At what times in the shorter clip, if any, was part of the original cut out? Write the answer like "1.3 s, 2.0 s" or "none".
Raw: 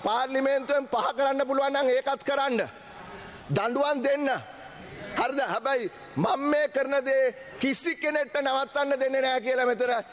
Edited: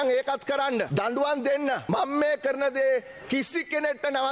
0.9 s, 1.8 s